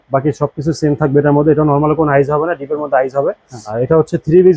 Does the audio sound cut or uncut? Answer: cut